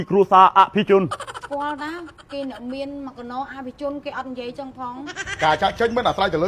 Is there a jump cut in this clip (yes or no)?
yes